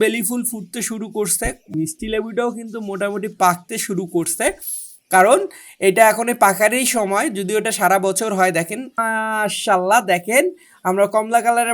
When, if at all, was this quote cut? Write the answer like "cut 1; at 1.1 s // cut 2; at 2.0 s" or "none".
cut 1; at 1.7 s // cut 2; at 9.0 s